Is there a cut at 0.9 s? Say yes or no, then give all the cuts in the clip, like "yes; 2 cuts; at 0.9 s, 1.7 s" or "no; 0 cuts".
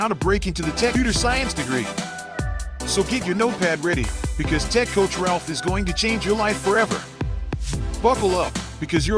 yes; 1 cut; at 0.9 s